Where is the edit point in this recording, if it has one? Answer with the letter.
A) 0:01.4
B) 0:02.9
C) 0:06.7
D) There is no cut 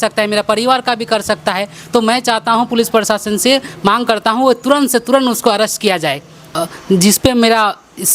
C